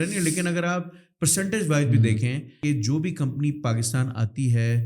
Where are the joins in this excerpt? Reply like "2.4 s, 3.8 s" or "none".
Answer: 2.5 s